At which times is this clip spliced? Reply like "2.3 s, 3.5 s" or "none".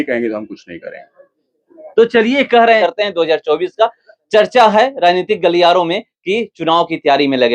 2.8 s